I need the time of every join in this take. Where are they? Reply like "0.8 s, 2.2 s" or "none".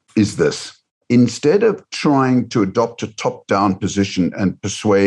1.0 s